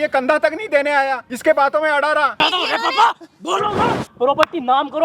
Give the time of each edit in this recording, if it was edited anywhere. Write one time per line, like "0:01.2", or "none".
0:01.3
0:02.4
0:04.1